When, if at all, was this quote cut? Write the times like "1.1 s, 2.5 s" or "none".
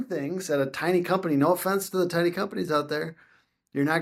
none